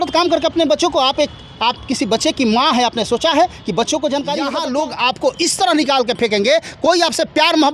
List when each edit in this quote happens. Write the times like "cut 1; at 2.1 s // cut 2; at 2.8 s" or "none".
cut 1; at 4.6 s